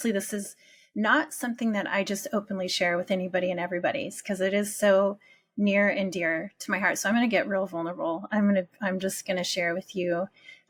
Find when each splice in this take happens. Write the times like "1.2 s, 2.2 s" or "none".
none